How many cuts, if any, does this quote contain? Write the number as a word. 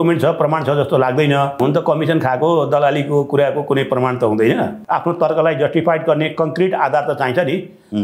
two